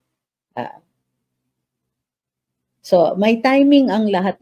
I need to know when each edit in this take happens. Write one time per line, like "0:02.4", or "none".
none